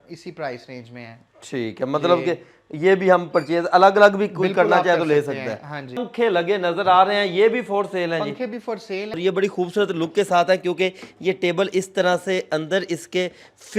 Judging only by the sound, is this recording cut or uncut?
cut